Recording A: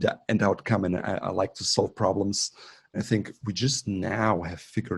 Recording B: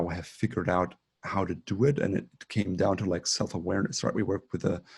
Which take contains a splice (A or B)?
A